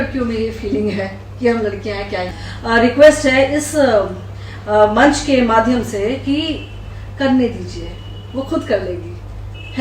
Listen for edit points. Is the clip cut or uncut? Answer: cut